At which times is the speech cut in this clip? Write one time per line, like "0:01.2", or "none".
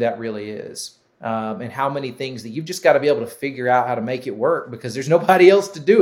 none